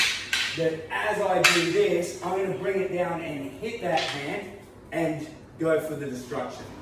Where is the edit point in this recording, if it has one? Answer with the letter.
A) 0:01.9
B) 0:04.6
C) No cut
C